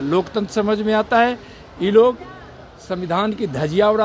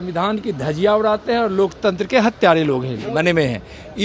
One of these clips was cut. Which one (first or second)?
second